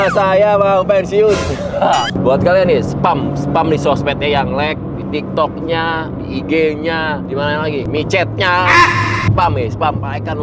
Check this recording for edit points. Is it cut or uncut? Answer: cut